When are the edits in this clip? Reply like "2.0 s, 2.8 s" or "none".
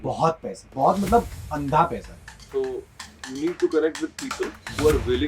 2.4 s